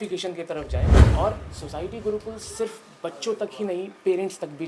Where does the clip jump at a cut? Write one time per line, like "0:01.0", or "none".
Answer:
0:01.0